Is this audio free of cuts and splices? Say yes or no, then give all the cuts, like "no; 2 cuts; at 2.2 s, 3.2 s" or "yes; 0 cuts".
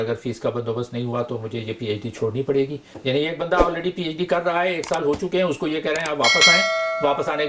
no; 1 cut; at 2.9 s